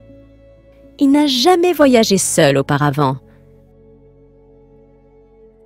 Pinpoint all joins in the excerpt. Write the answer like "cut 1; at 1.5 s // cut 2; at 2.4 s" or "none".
cut 1; at 0.9 s